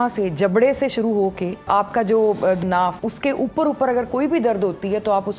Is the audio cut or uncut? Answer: cut